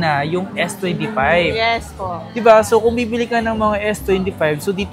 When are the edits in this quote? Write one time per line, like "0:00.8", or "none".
none